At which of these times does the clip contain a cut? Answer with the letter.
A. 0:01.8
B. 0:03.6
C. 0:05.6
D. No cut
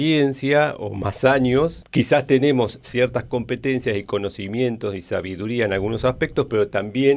A